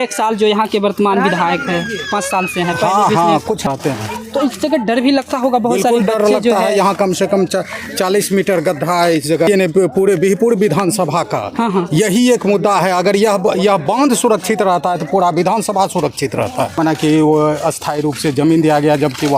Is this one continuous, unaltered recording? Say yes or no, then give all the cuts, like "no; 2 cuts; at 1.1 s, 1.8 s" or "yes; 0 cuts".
no; 3 cuts; at 3.6 s, 9.5 s, 16.7 s